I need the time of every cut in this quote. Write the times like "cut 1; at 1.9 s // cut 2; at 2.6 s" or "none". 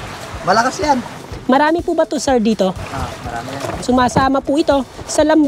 cut 1; at 3.8 s